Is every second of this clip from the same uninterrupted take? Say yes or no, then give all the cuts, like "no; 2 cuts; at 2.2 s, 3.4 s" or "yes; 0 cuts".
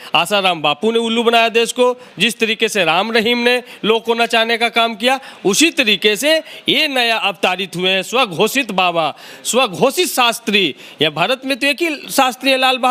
yes; 0 cuts